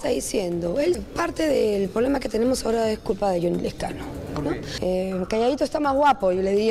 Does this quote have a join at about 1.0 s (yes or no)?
yes